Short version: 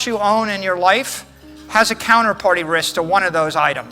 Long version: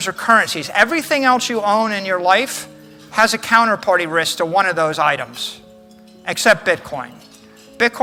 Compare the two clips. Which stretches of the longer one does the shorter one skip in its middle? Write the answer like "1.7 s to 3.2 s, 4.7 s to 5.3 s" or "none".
none

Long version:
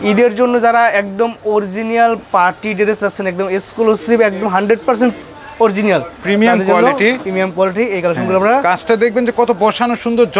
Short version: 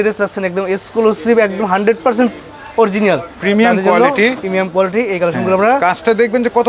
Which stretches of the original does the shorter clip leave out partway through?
none

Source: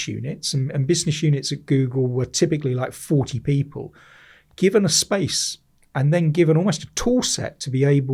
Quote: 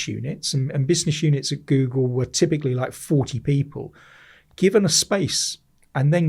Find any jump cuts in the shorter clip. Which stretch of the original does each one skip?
none

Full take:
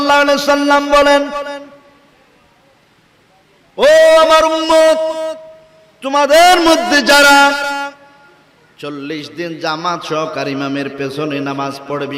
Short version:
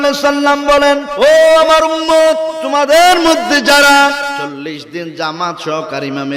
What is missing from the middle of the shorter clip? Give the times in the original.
1.5 s to 3.9 s, 5.2 s to 6.0 s, 7.8 s to 8.9 s

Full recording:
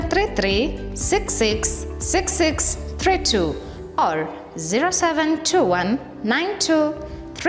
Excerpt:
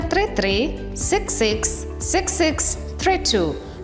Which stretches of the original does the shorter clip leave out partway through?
none

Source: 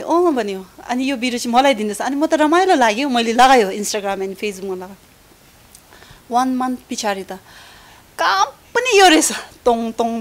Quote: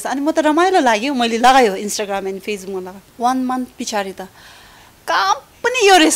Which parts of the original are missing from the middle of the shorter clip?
5.0 s to 6.1 s

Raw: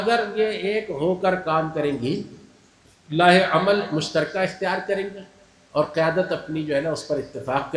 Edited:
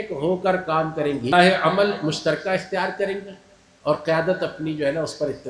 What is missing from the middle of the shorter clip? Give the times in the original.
2.1 s to 3.2 s

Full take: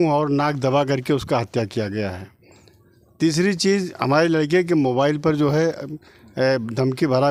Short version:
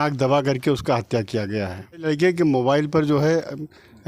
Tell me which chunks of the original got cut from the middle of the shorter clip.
2.5 s to 4.3 s

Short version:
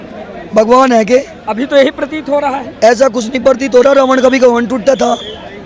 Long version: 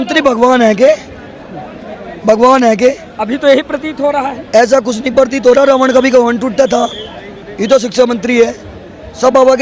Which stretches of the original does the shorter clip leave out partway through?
none

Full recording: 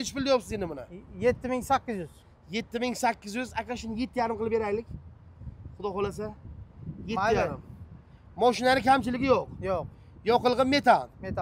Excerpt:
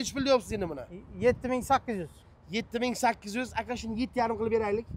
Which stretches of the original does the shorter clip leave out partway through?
none

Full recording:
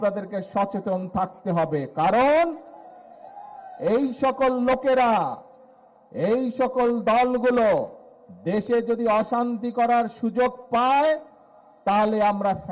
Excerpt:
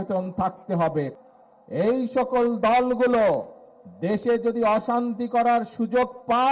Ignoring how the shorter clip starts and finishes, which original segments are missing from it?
1.9 s to 5.6 s

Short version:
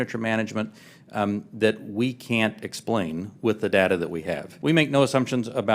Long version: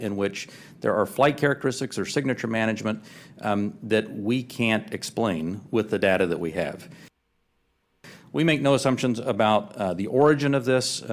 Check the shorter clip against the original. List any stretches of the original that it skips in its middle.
6.8 s to 8.2 s

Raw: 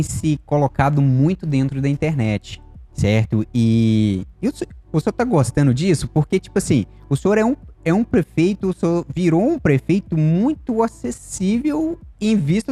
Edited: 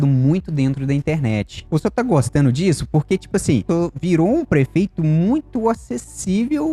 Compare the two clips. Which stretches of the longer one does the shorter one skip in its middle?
2.5 s to 4.8 s, 6.9 s to 8.8 s

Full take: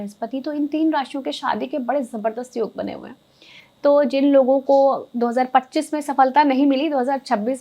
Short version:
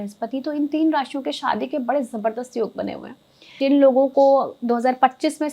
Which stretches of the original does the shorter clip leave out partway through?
3.6 s to 4.1 s

